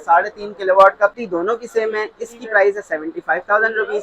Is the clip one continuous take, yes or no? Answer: no